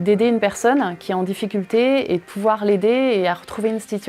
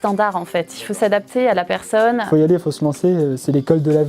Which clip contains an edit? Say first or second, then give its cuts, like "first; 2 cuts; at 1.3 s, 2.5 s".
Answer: second; 1 cut; at 2.2 s